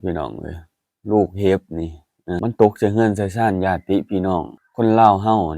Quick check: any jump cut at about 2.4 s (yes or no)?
yes